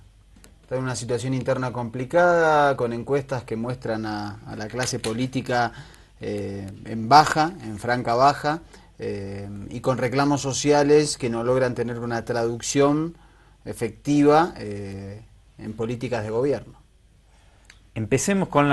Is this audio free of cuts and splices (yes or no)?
no